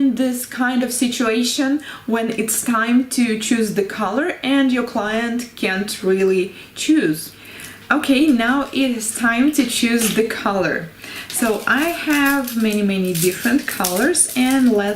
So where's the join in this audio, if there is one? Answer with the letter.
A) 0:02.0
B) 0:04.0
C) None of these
B